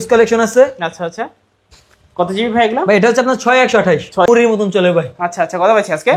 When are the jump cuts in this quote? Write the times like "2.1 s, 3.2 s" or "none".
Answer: 4.3 s